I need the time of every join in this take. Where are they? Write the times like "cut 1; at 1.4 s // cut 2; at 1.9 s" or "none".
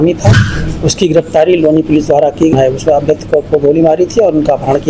cut 1; at 2.5 s